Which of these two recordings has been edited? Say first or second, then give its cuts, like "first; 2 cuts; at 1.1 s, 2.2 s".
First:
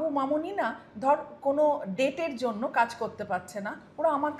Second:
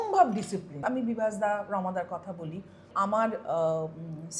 second; 2 cuts; at 0.8 s, 2.9 s